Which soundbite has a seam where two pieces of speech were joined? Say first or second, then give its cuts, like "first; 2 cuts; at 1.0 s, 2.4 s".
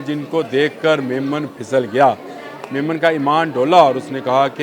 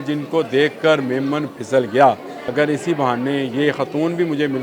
second; 1 cut; at 2.4 s